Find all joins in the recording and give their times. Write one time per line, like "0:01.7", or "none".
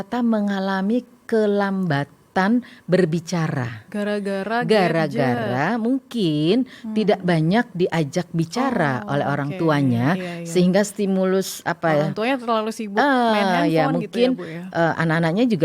none